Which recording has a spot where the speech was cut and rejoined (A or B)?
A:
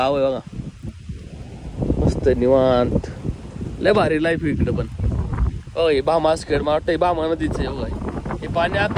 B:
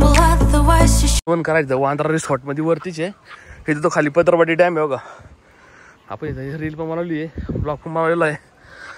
B